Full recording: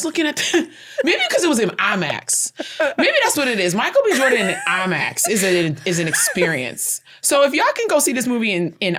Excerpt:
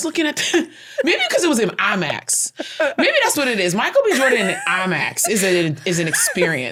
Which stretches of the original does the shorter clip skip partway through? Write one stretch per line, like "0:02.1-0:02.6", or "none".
none